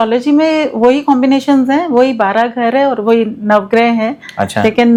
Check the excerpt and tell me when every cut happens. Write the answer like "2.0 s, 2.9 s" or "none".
none